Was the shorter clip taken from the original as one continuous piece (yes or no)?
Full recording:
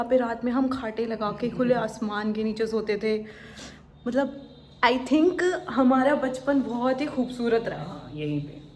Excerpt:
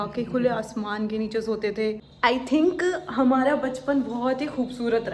no